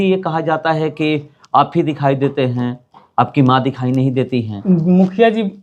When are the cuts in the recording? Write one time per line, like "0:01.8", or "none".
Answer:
0:04.5